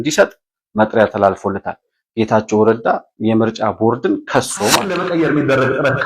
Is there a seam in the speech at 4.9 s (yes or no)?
yes